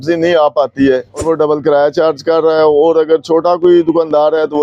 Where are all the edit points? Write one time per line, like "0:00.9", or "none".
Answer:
0:01.2